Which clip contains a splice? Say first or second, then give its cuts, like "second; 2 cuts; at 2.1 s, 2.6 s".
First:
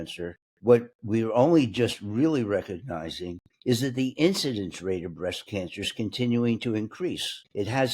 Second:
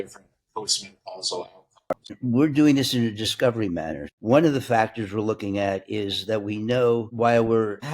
second; 2 cuts; at 2.2 s, 4.0 s